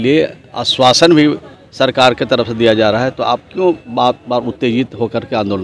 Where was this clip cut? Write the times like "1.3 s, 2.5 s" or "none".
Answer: none